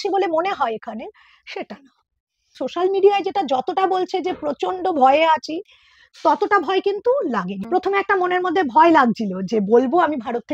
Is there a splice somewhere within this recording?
yes; 2 cuts; at 2.6 s, 7.6 s

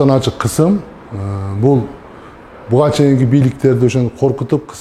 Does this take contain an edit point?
no; 0 cuts

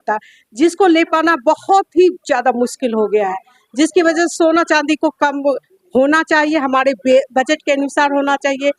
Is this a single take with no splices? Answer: yes; 0 cuts

